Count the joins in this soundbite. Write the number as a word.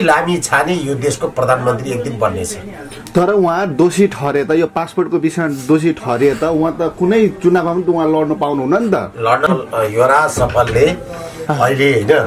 one